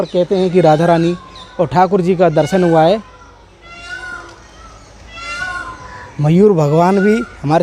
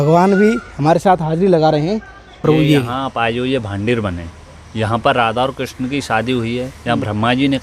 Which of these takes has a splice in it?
second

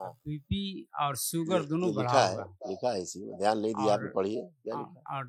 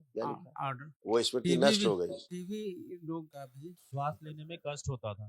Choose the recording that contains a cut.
second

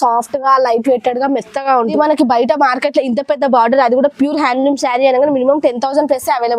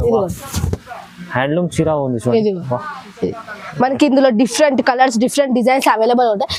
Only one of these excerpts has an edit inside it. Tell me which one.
first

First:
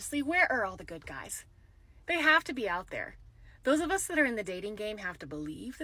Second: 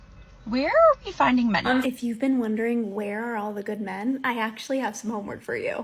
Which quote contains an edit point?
second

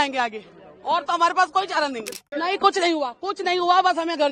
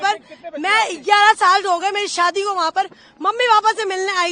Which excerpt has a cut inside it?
first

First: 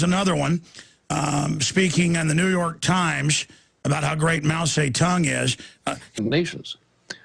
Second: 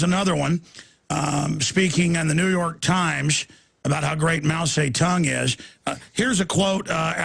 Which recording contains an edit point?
second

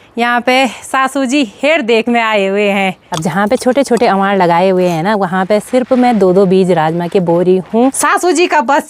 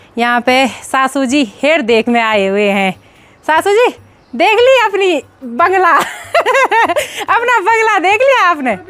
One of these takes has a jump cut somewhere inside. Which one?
first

